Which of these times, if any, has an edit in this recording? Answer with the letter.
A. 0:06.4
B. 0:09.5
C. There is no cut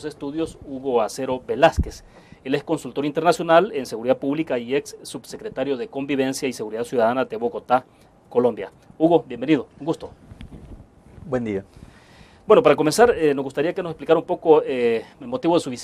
B